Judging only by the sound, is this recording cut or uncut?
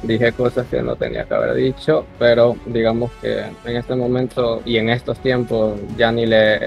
uncut